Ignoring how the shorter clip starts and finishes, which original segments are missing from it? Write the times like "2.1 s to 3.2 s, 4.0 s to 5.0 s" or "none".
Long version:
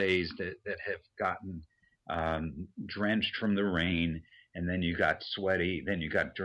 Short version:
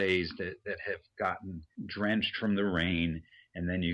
1.7 s to 2.7 s